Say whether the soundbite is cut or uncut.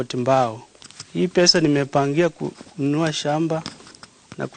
uncut